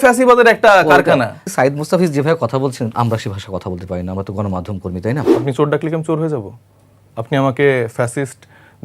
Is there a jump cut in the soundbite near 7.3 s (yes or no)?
no